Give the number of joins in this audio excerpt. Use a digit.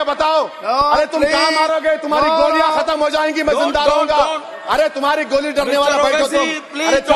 0